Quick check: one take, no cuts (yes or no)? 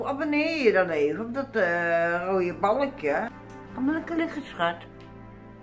no